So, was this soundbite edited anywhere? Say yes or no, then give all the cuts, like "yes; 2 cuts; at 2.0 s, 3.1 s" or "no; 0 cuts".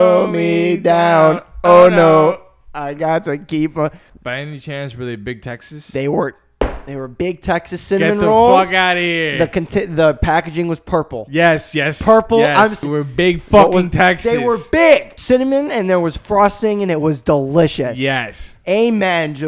yes; 3 cuts; at 4.1 s, 12.8 s, 15.1 s